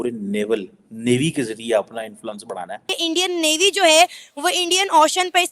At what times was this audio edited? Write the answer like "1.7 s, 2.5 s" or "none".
2.8 s